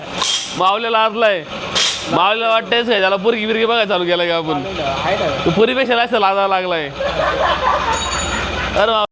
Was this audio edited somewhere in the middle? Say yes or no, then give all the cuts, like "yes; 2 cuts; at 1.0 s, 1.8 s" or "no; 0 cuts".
no; 0 cuts